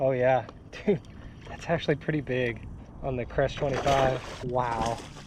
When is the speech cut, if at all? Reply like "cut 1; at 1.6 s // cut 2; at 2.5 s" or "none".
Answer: cut 1; at 4.3 s